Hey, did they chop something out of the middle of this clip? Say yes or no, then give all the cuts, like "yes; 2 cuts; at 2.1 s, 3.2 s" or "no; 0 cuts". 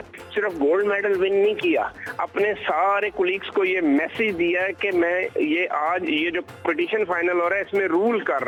no; 0 cuts